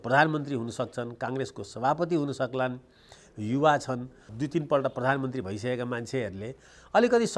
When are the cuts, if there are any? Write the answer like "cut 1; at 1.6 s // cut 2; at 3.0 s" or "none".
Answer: cut 1; at 4.3 s